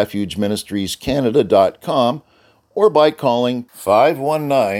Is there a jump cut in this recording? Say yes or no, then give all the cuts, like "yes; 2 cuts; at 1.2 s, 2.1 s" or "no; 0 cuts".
no; 0 cuts